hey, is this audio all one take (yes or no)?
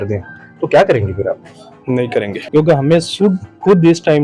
no